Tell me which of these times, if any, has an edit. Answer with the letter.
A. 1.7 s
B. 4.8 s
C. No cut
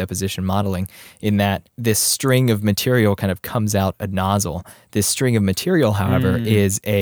A